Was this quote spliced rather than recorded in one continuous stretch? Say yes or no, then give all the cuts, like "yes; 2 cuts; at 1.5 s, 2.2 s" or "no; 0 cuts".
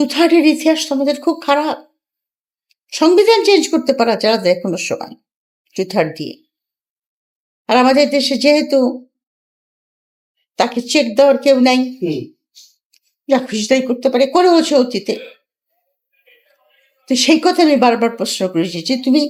no; 0 cuts